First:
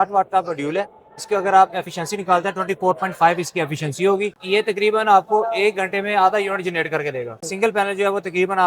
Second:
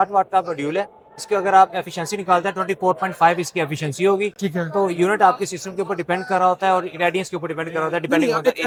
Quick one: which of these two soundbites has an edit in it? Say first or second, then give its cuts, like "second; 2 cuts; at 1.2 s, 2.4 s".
first; 2 cuts; at 4.3 s, 7.4 s